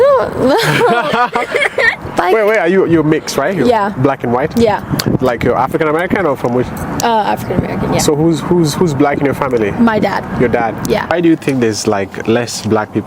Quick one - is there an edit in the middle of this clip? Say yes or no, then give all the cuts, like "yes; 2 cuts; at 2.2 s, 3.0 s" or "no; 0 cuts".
yes; 1 cut; at 11.1 s